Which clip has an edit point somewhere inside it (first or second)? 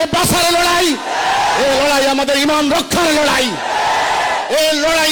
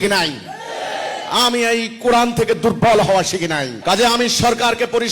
second